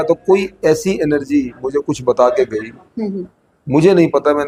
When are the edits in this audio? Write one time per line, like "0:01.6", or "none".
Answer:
none